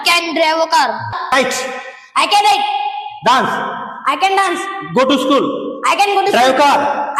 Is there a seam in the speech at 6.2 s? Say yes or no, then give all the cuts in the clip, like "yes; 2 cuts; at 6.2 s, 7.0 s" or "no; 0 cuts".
no; 1 cut; at 1.3 s